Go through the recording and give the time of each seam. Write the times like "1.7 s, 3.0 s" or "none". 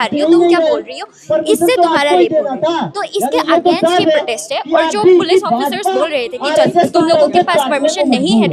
none